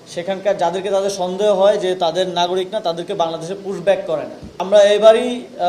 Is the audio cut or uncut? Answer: cut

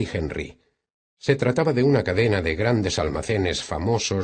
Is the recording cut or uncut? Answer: cut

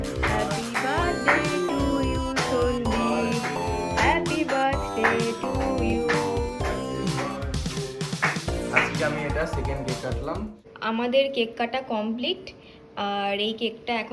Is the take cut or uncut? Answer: uncut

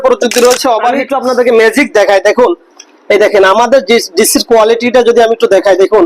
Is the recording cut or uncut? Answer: cut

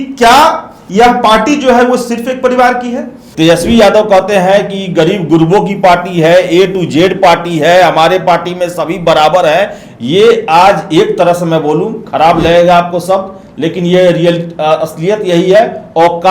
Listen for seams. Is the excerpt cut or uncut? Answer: cut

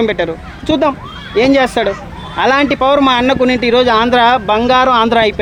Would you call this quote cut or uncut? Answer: uncut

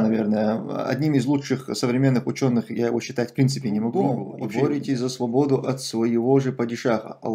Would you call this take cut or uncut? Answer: cut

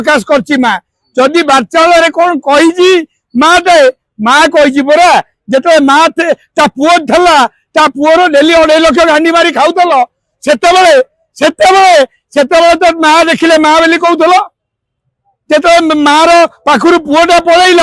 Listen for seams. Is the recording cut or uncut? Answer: uncut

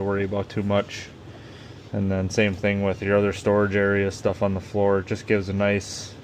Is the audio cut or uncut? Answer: uncut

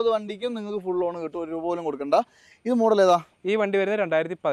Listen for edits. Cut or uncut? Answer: uncut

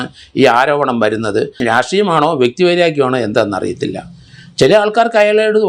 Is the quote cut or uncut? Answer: cut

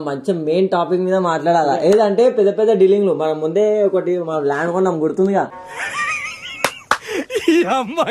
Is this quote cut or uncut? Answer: uncut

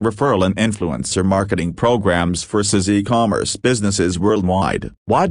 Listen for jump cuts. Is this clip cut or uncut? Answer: uncut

